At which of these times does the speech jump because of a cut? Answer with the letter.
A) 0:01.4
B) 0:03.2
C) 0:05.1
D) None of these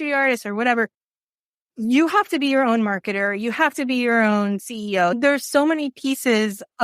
C